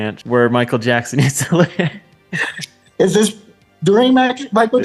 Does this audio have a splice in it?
no; 0 cuts

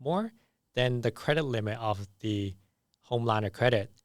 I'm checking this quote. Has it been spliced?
no; 0 cuts

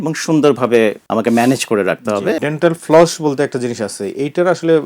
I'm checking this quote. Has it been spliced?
yes; 2 cuts; at 1.0 s, 2.4 s

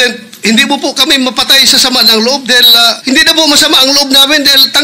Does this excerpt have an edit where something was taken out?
yes; 1 cut; at 3.0 s

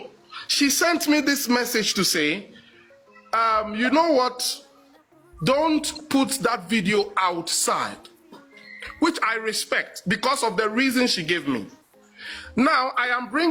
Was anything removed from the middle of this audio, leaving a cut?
no; 0 cuts

